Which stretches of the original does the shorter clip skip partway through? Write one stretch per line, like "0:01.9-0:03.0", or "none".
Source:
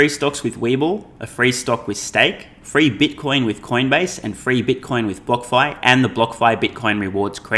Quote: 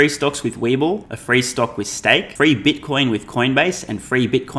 0:01.1-0:01.2
0:02.4-0:02.6